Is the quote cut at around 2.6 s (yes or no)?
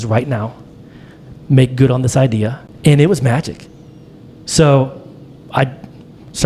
yes